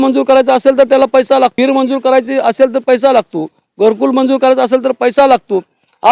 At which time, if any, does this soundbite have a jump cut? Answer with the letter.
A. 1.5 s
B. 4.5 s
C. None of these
A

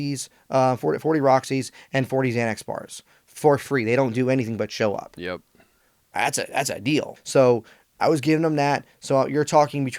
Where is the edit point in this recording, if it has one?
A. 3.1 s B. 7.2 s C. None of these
B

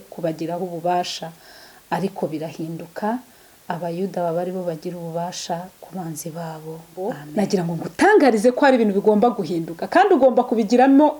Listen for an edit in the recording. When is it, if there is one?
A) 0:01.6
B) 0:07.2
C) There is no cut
B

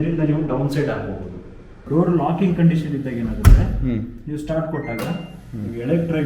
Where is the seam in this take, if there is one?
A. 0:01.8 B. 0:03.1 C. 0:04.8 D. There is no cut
A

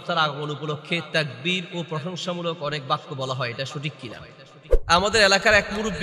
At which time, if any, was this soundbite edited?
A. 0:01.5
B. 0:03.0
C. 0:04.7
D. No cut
C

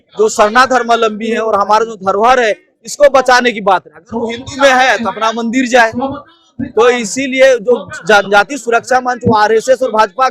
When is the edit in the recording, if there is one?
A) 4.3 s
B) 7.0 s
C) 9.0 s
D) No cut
D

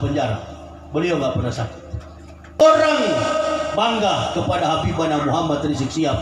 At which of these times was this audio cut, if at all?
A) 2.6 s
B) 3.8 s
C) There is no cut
A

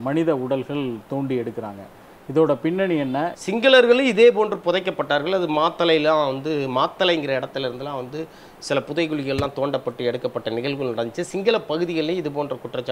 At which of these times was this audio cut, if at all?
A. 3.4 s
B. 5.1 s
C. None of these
A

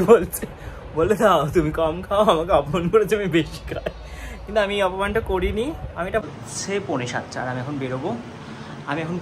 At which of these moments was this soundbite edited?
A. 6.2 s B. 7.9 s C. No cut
A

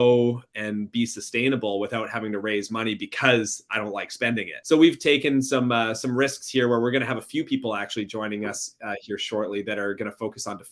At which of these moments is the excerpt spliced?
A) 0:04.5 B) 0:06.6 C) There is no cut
C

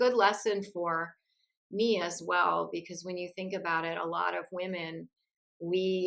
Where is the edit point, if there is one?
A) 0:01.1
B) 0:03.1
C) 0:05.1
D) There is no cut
D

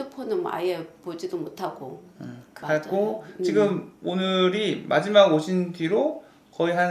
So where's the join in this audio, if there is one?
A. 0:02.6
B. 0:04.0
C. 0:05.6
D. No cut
A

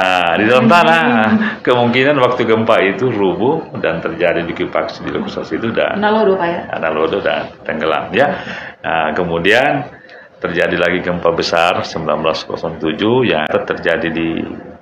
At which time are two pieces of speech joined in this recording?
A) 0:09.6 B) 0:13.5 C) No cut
B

